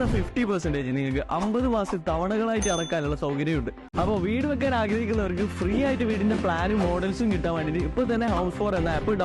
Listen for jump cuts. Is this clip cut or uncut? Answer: uncut